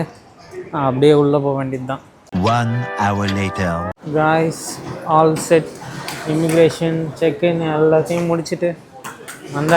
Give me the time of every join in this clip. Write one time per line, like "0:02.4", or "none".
none